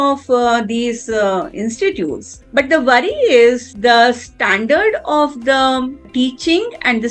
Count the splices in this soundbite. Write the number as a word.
one